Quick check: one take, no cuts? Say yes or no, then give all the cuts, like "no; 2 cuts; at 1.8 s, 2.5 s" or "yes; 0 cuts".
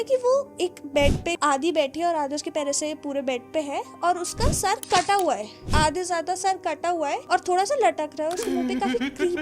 no; 3 cuts; at 1.3 s, 5.6 s, 7.2 s